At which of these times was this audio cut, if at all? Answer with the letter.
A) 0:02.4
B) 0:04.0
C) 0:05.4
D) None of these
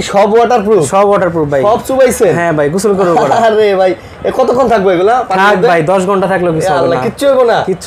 D